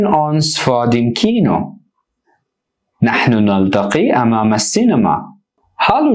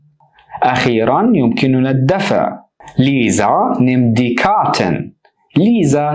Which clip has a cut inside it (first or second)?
first